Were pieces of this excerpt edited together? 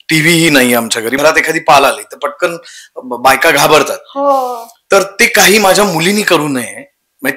yes; 1 cut; at 1.1 s

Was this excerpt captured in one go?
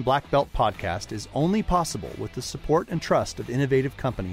yes; 0 cuts

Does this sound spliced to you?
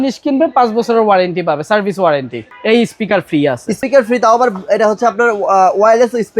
yes; 2 cuts; at 2.3 s, 3.8 s

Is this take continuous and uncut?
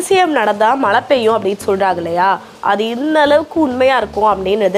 yes; 0 cuts

